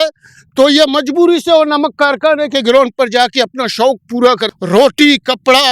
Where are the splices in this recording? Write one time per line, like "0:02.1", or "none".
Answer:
0:04.5